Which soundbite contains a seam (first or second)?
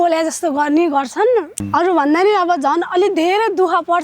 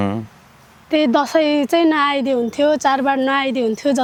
first